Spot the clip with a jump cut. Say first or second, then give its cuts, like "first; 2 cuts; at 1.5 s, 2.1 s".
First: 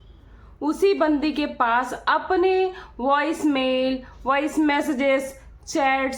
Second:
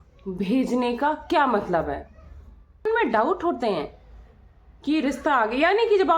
second; 1 cut; at 2.9 s